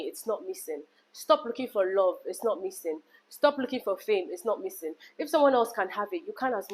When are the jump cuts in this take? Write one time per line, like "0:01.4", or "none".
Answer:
none